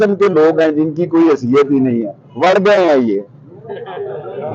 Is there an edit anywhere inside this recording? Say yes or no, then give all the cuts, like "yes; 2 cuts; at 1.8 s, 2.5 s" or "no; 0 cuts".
no; 0 cuts